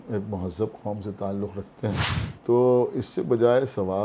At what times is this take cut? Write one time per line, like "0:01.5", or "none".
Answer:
0:02.2